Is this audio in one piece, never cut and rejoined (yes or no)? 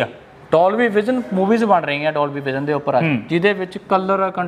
yes